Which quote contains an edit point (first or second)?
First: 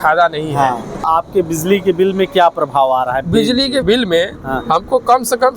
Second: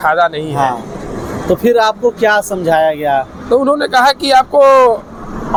first